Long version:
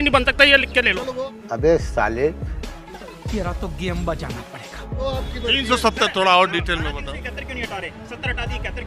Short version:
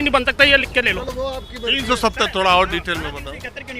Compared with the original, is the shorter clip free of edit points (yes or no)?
no